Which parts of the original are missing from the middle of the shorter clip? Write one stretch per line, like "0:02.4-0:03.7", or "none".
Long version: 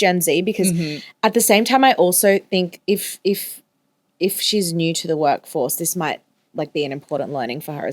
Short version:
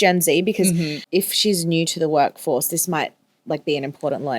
0:01.0-0:04.0